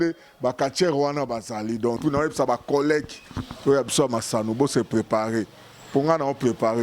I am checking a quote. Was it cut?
yes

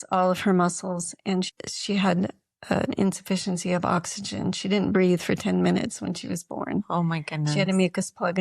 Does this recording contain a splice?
yes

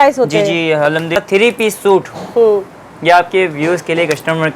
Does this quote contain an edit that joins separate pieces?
yes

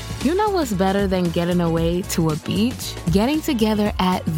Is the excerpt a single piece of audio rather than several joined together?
yes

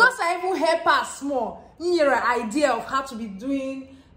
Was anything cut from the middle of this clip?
no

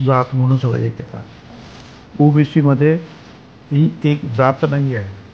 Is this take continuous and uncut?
yes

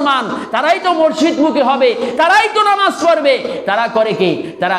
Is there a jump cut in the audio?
no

